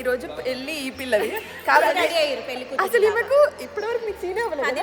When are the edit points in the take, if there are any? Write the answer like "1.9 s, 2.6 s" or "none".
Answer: none